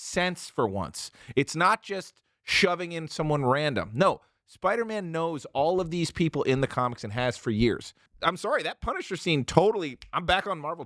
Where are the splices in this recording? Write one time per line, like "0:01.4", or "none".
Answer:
0:08.0